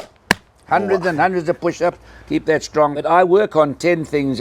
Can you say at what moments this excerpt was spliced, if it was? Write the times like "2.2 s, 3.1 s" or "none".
3.0 s